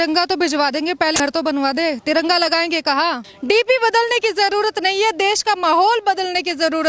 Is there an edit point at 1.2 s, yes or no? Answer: yes